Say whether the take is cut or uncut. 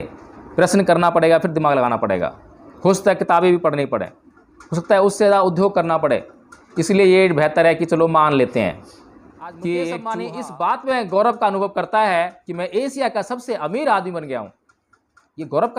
cut